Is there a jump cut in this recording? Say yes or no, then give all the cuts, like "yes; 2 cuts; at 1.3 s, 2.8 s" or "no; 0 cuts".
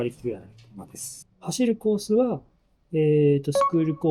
yes; 1 cut; at 1.2 s